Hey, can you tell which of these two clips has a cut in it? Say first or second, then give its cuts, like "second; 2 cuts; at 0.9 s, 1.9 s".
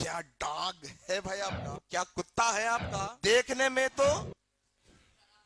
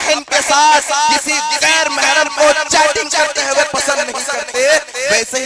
first; 3 cuts; at 1.7 s, 2.9 s, 4.2 s